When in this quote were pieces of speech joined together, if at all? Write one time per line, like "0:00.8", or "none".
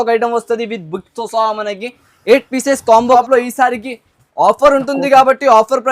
0:03.2